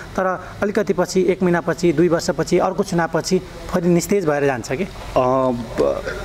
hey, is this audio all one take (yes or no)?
yes